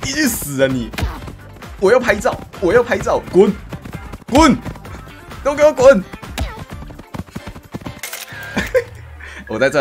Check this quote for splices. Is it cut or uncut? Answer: uncut